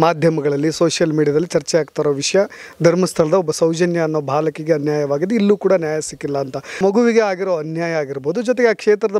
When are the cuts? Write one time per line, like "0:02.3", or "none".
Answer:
0:06.8

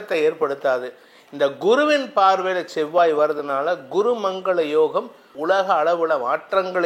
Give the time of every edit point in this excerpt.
0:05.3

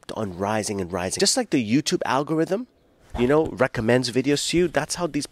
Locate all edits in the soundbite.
0:01.1

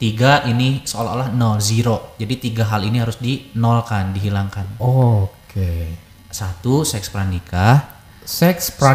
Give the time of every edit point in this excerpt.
none

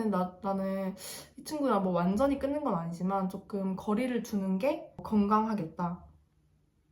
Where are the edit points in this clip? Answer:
0:05.0

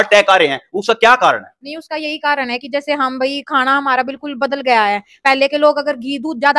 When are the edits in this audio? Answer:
none

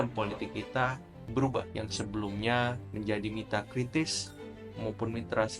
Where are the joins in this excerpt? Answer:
0:01.7
0:02.8

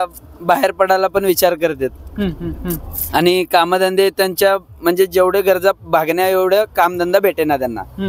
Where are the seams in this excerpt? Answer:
none

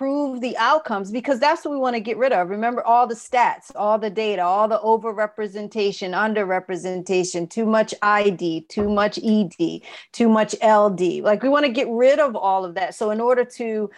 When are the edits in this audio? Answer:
none

